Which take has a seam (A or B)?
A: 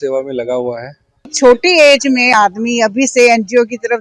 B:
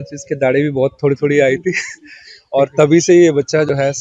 A